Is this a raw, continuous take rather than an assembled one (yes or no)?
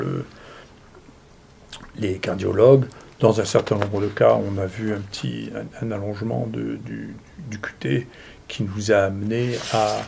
yes